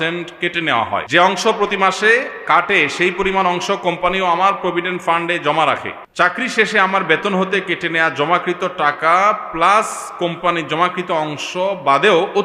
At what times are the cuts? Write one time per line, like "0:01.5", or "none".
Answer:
0:01.1
0:06.0